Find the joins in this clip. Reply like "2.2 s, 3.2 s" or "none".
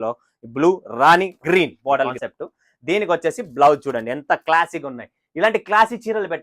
2.2 s